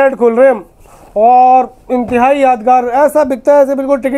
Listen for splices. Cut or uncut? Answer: uncut